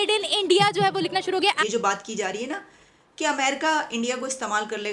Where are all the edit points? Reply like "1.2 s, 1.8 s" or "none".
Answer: 1.6 s